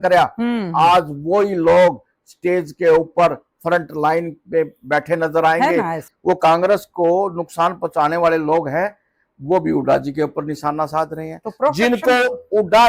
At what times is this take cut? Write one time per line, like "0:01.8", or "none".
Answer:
0:06.1